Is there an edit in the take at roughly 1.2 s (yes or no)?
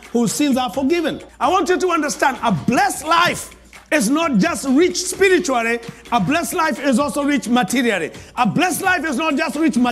yes